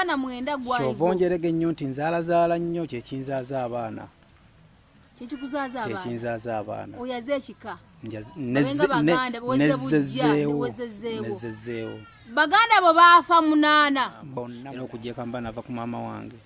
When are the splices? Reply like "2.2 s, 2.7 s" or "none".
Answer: 14.3 s